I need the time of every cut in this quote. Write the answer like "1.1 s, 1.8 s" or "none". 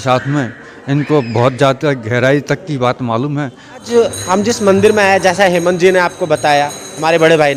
3.8 s